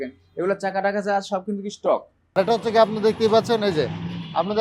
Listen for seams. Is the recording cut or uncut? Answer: cut